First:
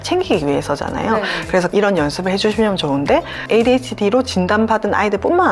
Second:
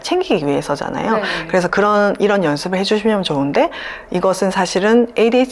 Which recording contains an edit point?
first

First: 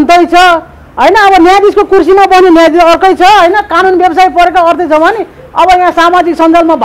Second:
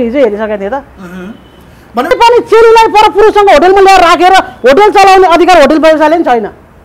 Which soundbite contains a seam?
second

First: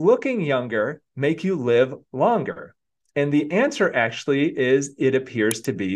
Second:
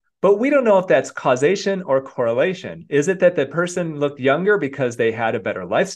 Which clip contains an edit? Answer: first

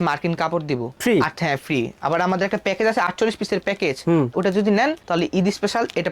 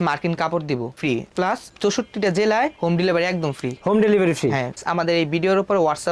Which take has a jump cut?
second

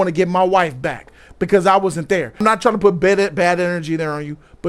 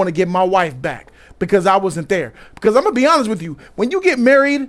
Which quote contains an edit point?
first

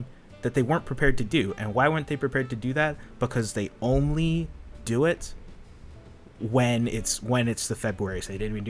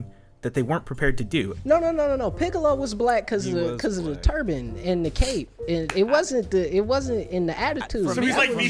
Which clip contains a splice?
second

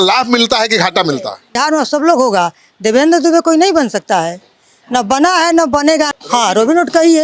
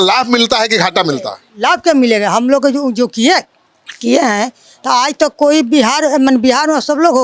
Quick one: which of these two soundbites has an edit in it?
first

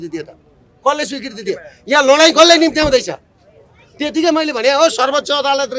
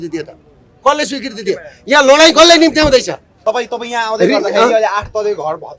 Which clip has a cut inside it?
second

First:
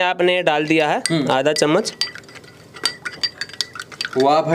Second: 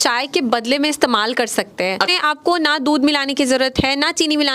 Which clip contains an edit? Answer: second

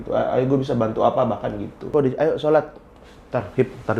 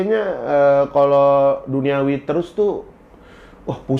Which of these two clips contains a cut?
first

